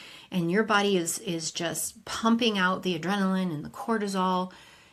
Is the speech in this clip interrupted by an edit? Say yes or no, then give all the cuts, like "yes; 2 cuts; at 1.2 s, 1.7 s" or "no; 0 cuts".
no; 0 cuts